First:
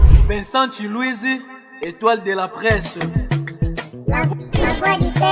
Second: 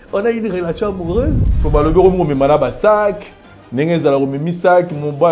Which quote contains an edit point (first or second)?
second